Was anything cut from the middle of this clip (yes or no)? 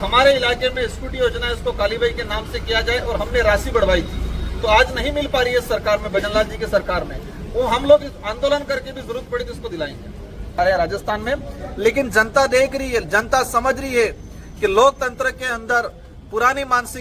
yes